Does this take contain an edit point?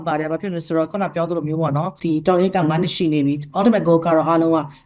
yes; 1 cut; at 1.9 s

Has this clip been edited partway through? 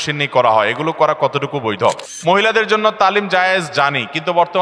yes; 1 cut; at 2.1 s

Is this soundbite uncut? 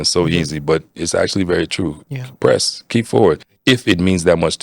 no; 1 cut; at 3.5 s

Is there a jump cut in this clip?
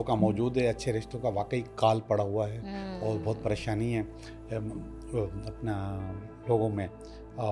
no; 0 cuts

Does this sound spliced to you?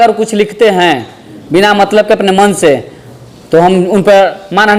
no; 0 cuts

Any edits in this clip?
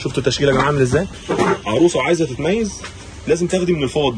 yes; 1 cut; at 1.2 s

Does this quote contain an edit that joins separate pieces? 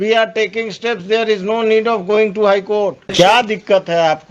yes; 1 cut; at 3.1 s

